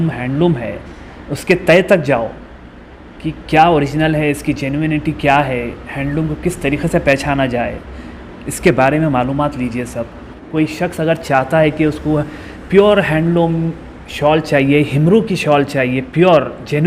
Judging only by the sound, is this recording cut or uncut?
cut